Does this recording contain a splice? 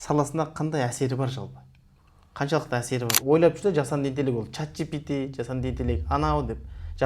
yes; 1 cut; at 3.1 s

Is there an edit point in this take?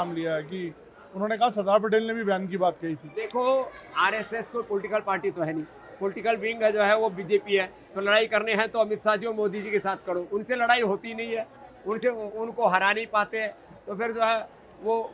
no; 0 cuts

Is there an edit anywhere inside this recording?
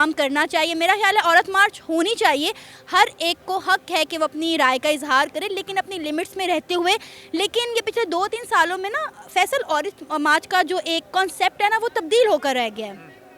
no; 0 cuts

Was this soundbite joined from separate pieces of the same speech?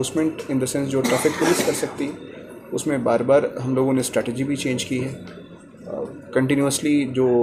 no; 0 cuts

